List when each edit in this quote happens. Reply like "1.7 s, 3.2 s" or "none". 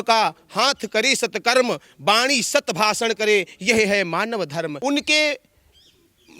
4.8 s